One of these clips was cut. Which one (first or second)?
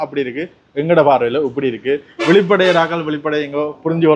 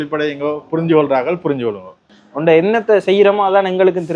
second